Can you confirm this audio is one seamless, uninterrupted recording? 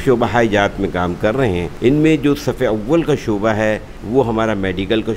no; 2 cuts; at 1.7 s, 3.9 s

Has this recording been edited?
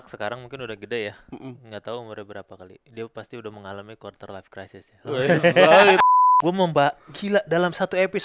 yes; 1 cut; at 6.0 s

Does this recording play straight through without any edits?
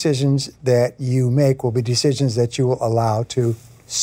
yes; 0 cuts

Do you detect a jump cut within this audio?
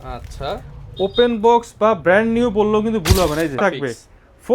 yes; 1 cut; at 3.5 s

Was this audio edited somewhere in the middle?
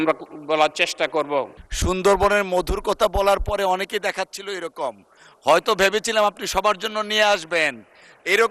yes; 1 cut; at 1.6 s

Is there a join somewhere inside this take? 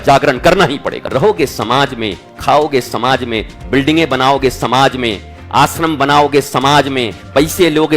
yes; 1 cut; at 1.0 s

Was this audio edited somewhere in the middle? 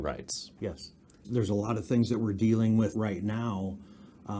yes; 2 cuts; at 1.3 s, 2.9 s

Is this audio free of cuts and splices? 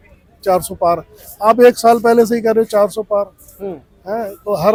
yes; 0 cuts

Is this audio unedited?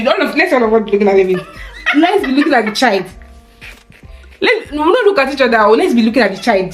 yes; 0 cuts

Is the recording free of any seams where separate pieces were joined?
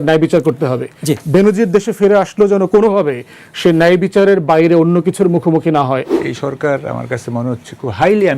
no; 1 cut; at 6.1 s

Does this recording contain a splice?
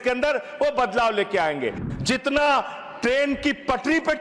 yes; 1 cut; at 1.8 s

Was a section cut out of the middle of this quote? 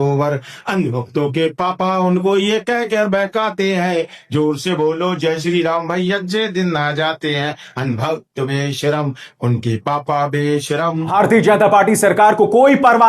yes; 1 cut; at 11.1 s

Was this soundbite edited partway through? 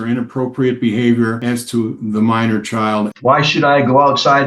yes; 1 cut; at 3.1 s

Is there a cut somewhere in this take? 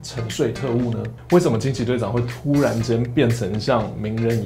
yes; 1 cut; at 1.1 s

